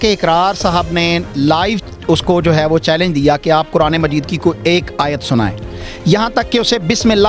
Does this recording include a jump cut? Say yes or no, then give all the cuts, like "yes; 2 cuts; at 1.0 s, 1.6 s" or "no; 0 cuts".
no; 0 cuts